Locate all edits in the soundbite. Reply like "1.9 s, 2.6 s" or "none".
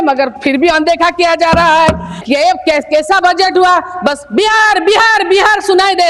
2.1 s